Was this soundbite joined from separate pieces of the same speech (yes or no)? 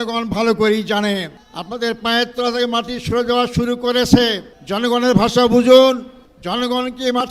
yes